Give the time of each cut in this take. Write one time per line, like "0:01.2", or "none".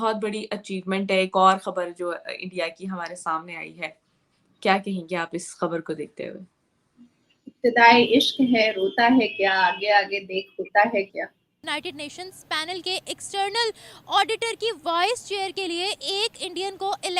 0:11.8